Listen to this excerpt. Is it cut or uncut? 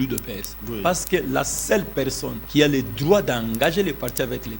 cut